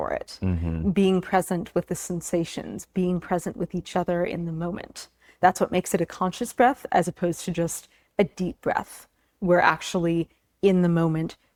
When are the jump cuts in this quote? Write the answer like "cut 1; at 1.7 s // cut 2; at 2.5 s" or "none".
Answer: none